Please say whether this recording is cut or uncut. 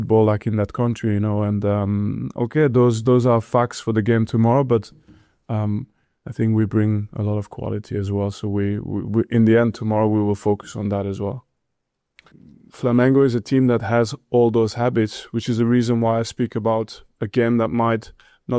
cut